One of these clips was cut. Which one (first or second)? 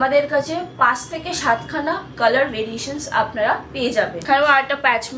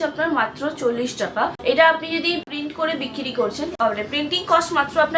first